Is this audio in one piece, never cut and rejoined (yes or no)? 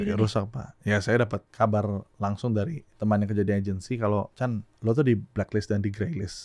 no